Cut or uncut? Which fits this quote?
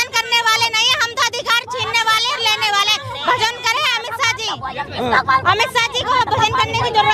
uncut